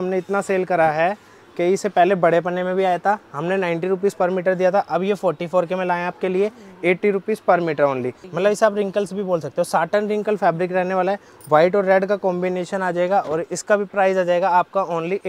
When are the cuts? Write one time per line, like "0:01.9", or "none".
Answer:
0:08.2